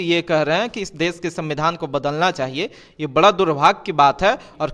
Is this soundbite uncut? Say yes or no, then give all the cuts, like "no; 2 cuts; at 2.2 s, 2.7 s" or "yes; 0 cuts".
yes; 0 cuts